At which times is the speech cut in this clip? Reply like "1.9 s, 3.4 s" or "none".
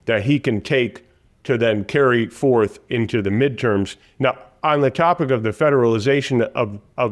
none